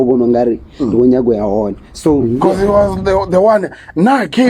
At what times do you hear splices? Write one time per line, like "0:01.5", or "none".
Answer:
0:02.2